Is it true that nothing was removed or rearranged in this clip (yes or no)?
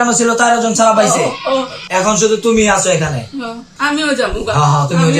no